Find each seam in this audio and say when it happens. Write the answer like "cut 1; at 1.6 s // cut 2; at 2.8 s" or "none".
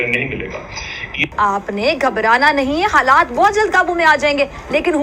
cut 1; at 1.2 s